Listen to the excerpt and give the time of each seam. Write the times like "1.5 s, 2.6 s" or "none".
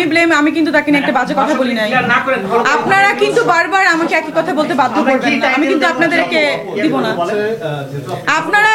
none